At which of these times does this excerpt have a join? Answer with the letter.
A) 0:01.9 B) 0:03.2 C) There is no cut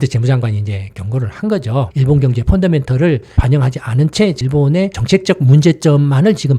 A